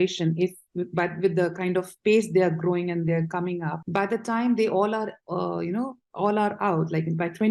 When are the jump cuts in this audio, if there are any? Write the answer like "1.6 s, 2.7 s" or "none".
3.8 s